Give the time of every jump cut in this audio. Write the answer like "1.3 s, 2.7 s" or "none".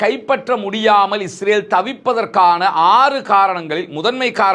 none